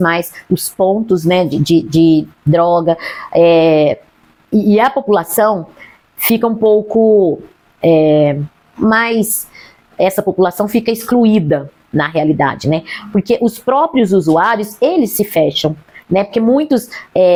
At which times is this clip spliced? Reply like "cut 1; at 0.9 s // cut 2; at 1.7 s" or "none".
none